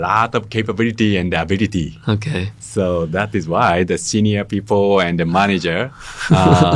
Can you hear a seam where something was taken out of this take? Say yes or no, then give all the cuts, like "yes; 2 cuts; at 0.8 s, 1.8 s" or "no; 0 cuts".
no; 0 cuts